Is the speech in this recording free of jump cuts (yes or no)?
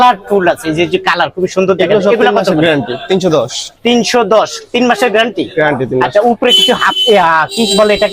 yes